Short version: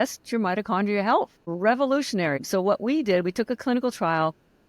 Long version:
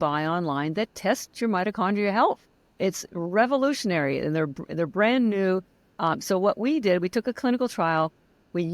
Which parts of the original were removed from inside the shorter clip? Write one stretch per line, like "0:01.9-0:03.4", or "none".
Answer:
0:02.5-0:03.1
0:04.1-0:06.2